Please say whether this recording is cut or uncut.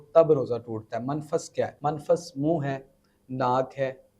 cut